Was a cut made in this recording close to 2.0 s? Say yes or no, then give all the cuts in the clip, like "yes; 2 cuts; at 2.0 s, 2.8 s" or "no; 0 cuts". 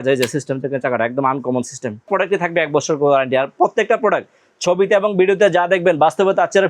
yes; 1 cut; at 2.0 s